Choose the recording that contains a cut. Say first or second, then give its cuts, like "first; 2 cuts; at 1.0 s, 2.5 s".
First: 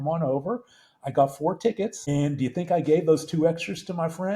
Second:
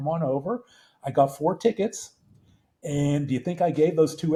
first; 1 cut; at 2.0 s